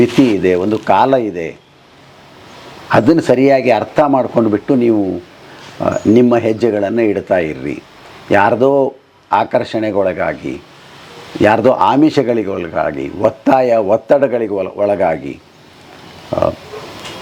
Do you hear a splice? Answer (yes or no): no